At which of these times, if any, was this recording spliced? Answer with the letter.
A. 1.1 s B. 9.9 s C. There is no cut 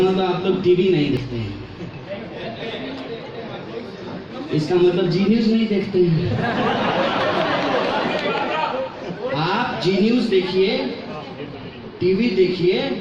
A